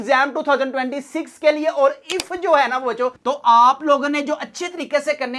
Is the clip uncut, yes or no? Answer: no